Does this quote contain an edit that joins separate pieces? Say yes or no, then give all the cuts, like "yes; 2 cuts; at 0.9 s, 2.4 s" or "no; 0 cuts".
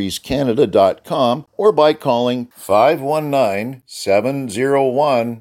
yes; 1 cut; at 1.5 s